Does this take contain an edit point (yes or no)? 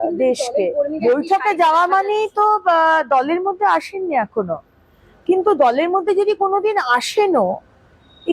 yes